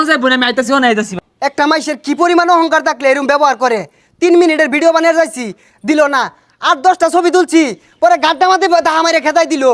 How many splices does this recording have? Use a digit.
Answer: 1